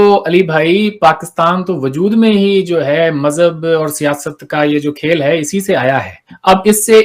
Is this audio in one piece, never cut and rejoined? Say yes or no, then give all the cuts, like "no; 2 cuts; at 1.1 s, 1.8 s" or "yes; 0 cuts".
yes; 0 cuts